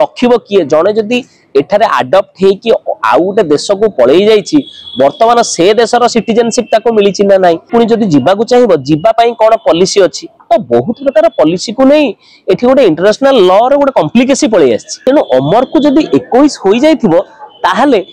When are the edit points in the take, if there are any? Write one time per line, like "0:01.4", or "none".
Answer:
0:07.7
0:14.9